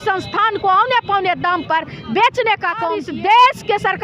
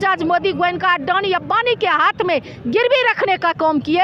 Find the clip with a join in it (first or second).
first